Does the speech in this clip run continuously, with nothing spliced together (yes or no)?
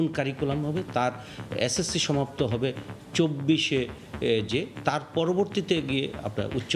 yes